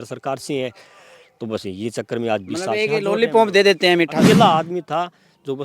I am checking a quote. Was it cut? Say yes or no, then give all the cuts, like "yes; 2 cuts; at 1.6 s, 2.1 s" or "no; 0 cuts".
yes; 1 cut; at 4.2 s